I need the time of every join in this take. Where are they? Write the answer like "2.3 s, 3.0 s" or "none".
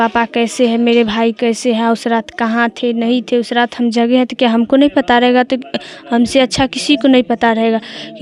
none